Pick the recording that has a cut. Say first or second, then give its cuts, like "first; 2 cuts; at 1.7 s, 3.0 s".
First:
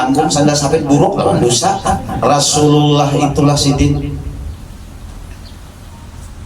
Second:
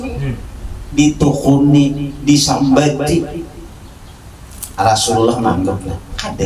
first; 1 cut; at 2.2 s